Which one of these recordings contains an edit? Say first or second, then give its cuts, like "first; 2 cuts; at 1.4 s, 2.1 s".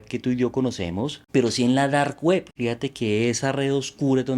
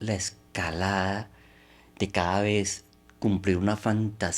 first; 2 cuts; at 1.2 s, 2.5 s